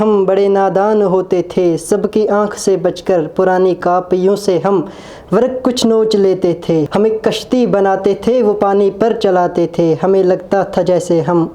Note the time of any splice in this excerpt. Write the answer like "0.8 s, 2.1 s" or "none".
6.9 s